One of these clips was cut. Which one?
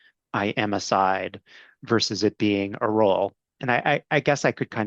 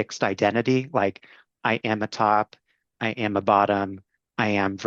first; 2 cuts; at 1.7 s, 4.0 s

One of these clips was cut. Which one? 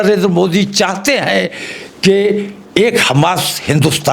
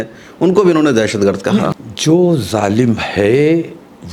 second; 1 cut; at 1.9 s

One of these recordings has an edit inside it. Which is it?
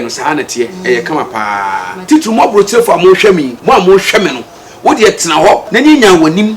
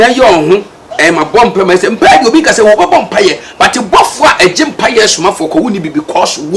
first; 3 cuts; at 1.9 s, 3.5 s, 5.7 s

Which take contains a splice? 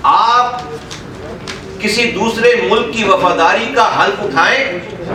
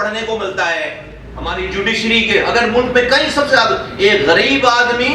second; 1 cut; at 1.5 s

